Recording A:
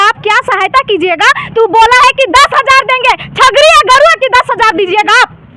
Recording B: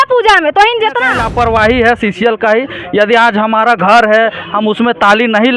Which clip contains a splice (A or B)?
B